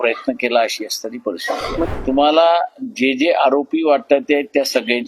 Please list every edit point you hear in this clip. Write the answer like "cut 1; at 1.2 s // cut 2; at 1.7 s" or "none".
cut 1; at 1.9 s